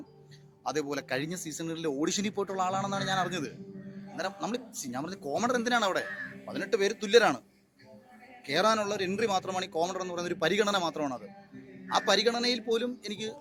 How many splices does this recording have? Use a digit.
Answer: 0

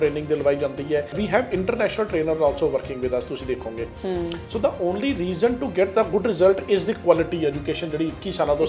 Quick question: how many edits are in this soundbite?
1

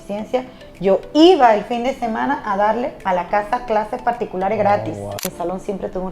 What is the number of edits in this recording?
2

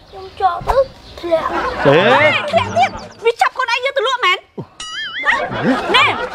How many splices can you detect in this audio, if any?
2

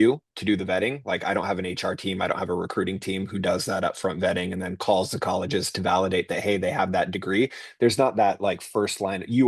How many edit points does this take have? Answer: 0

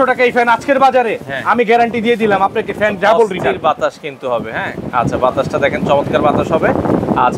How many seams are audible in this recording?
0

